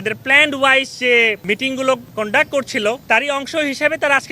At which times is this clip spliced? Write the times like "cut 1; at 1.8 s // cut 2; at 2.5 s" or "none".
cut 1; at 1.7 s // cut 2; at 3.0 s